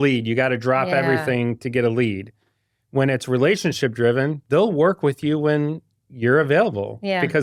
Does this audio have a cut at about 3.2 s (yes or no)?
no